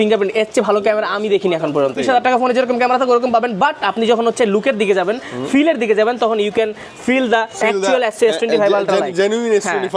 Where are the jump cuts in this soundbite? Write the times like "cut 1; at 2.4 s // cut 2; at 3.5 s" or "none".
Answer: cut 1; at 2.0 s